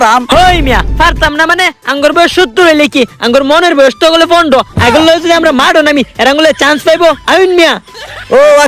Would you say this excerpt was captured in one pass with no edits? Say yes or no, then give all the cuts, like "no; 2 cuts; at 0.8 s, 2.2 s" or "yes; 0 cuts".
yes; 0 cuts